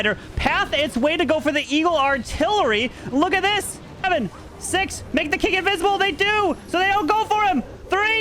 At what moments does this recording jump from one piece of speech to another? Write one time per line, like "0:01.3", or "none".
0:04.0